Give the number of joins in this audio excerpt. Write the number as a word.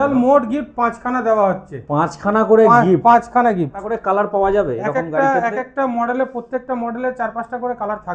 one